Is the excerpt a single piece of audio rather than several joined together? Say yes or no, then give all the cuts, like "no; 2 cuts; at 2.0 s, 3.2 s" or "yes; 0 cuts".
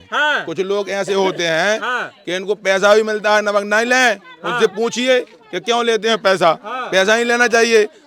yes; 0 cuts